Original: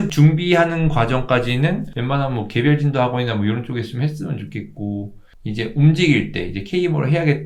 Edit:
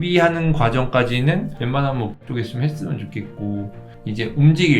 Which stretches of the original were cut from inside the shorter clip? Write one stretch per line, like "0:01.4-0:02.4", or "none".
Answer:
0:02.5-0:03.6